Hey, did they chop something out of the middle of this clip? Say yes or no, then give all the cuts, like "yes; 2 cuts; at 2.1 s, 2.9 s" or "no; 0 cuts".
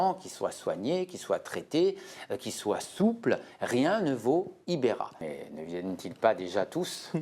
yes; 1 cut; at 5.3 s